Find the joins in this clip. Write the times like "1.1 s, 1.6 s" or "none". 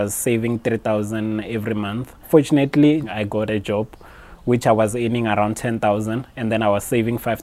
2.3 s, 3.1 s